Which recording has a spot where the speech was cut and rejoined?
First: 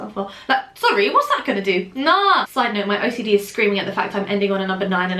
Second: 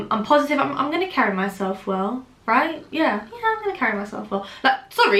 first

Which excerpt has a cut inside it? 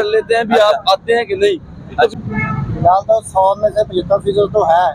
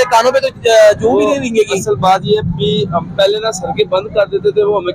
first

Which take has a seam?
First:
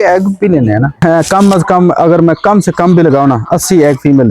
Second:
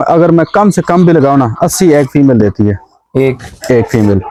first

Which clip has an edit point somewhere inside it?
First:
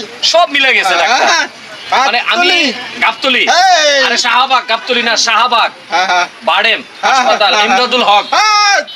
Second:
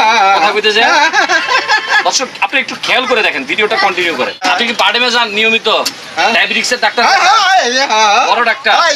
second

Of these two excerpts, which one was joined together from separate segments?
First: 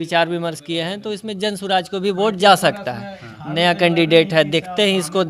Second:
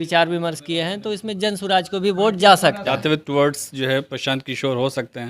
second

